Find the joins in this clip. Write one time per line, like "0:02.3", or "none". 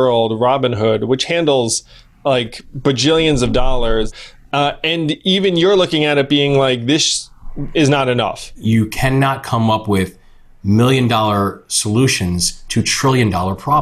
0:04.1
0:08.5